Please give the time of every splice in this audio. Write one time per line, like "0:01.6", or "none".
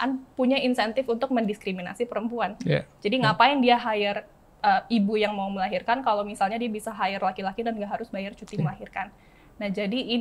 none